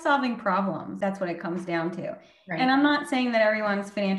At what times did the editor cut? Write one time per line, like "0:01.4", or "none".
0:00.9